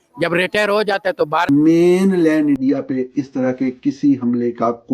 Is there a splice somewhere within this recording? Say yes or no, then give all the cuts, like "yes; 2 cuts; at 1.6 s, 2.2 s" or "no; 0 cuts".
yes; 1 cut; at 1.5 s